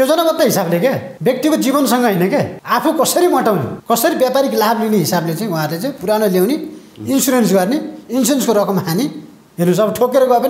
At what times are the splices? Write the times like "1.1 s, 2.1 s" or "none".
1.1 s, 2.6 s, 3.7 s